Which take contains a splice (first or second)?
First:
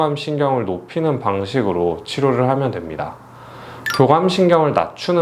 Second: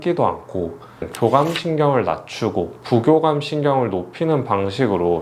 second